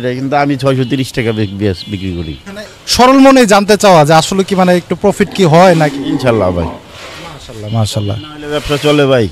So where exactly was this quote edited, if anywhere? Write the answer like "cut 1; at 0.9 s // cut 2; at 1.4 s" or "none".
cut 1; at 2.8 s

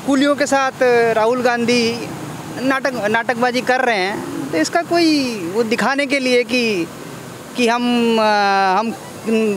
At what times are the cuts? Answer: none

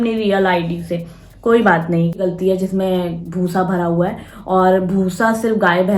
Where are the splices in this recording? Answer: cut 1; at 2.2 s

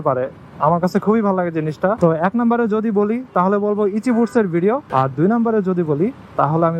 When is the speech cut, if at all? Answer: cut 1; at 2.0 s // cut 2; at 4.8 s

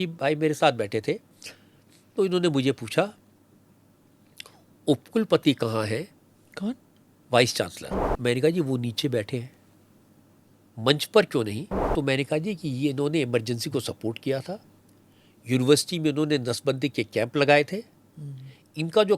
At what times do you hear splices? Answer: cut 1; at 8.0 s // cut 2; at 11.7 s

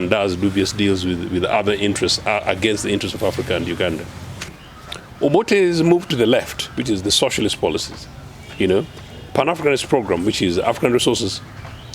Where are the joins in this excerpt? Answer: cut 1; at 4.6 s

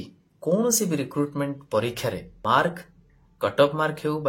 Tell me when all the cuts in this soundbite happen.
cut 1; at 2.4 s

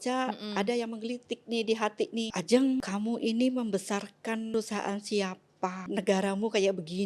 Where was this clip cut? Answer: cut 1; at 2.3 s // cut 2; at 2.8 s // cut 3; at 4.5 s // cut 4; at 5.8 s

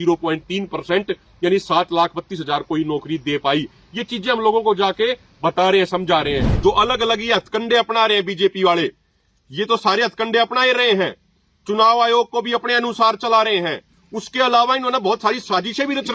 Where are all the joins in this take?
cut 1; at 6.5 s

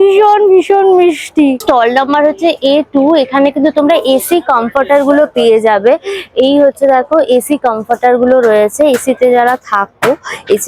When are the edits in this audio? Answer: none

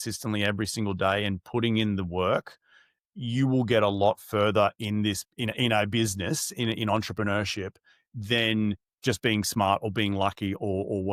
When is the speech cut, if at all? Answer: none

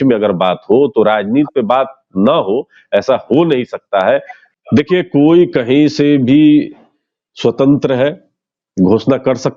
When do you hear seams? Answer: cut 1; at 4.4 s

